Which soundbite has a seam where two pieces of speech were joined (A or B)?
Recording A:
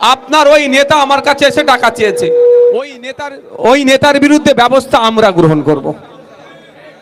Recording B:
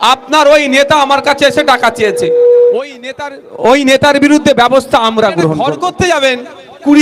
B